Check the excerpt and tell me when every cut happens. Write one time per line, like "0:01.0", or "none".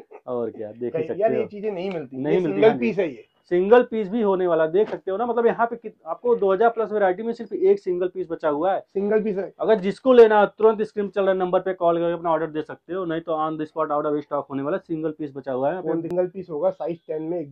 0:16.1